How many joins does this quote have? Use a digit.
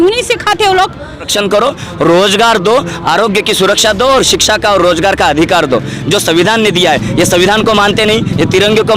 1